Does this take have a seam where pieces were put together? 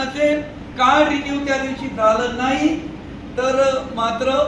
no; 0 cuts

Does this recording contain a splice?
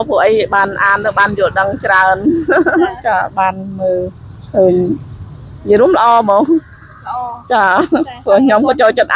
no; 0 cuts

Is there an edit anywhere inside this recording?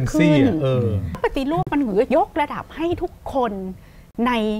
yes; 1 cut; at 1.2 s

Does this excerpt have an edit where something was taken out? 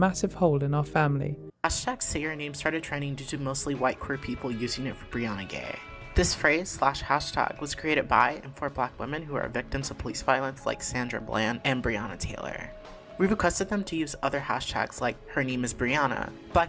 yes; 1 cut; at 1.4 s

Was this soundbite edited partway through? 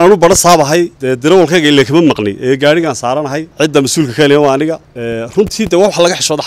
yes; 3 cuts; at 1.0 s, 3.5 s, 4.9 s

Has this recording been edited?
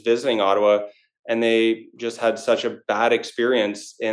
no; 0 cuts

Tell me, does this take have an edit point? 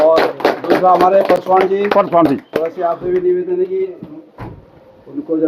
no; 0 cuts

